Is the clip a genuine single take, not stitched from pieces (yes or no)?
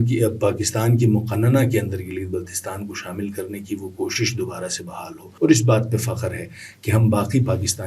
no